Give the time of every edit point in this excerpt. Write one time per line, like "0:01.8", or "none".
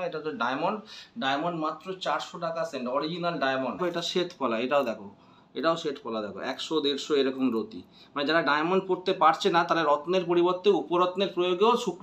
0:03.8